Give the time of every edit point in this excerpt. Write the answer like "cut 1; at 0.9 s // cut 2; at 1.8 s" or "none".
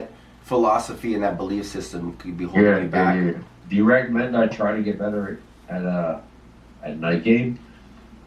cut 1; at 3.5 s